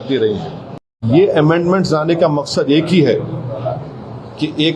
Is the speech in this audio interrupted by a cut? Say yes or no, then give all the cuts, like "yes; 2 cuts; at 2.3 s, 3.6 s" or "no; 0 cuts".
yes; 1 cut; at 1.1 s